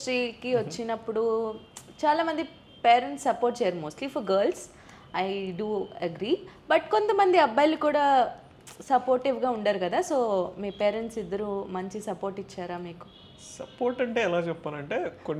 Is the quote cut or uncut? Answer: uncut